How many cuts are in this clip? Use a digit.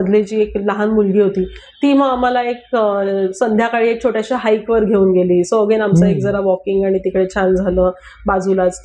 0